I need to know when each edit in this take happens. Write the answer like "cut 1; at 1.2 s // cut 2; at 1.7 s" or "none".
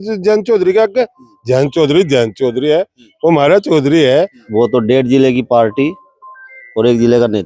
cut 1; at 4.4 s